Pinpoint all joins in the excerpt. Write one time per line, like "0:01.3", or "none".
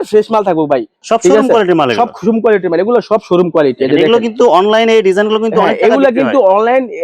0:01.0